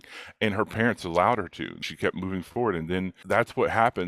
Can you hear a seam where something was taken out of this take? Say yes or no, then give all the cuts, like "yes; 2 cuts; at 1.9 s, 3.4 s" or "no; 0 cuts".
yes; 2 cuts; at 1.9 s, 3.2 s